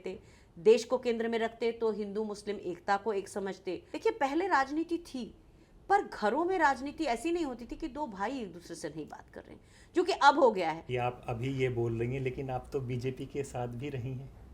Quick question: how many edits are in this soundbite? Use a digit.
2